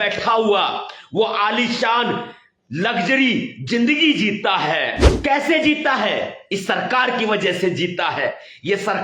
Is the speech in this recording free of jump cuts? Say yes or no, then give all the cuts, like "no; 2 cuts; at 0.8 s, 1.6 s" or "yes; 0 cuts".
no; 1 cut; at 5.0 s